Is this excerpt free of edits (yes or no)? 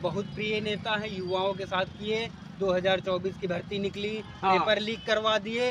yes